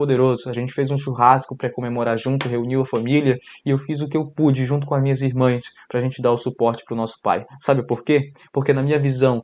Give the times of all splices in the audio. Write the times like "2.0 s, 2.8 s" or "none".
none